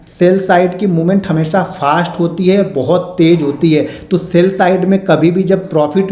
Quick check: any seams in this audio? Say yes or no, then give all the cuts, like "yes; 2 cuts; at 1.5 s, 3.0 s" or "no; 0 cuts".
no; 0 cuts